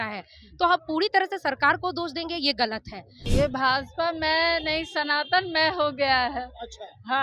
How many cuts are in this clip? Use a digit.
1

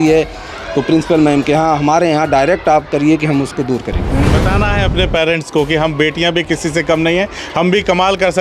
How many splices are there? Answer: 1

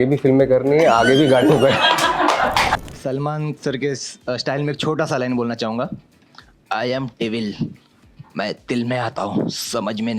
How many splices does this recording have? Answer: 1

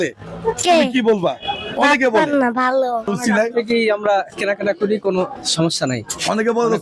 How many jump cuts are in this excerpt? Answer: 1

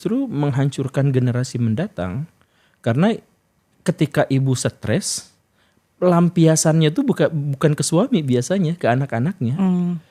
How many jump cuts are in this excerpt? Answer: 0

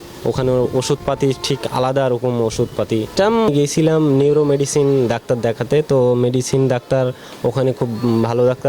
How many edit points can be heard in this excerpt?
1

